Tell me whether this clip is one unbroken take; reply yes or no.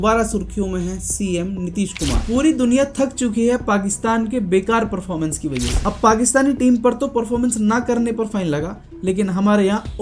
no